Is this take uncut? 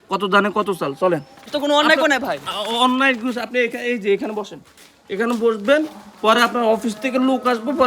no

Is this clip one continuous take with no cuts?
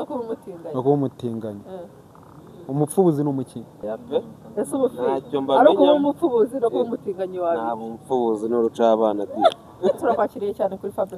no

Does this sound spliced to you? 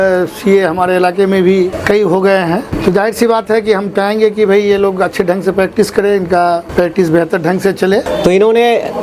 yes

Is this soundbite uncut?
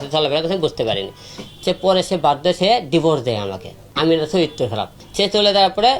no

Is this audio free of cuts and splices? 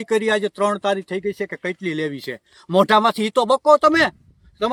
yes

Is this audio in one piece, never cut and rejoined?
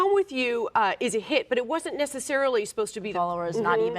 no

